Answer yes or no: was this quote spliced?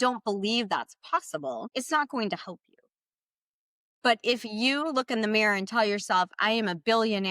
yes